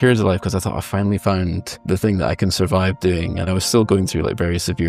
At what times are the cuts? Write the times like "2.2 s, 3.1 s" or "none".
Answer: none